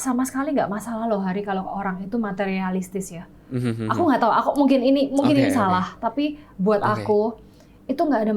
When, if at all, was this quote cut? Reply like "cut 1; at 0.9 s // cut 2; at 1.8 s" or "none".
none